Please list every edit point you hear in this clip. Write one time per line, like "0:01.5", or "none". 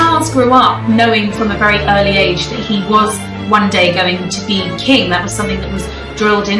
none